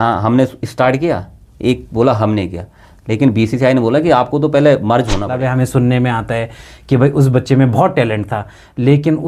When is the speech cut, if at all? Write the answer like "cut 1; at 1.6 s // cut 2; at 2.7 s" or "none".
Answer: cut 1; at 5.3 s